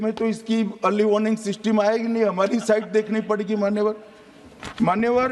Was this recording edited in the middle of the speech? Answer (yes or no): no